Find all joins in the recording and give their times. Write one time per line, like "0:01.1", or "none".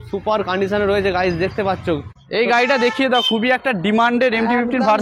0:02.2